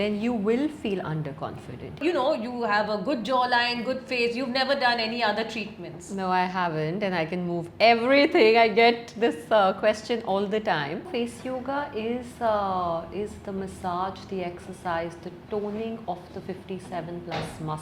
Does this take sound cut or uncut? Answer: cut